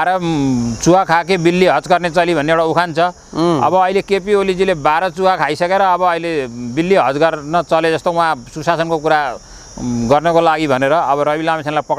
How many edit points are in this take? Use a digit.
0